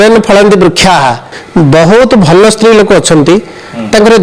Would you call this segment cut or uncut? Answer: cut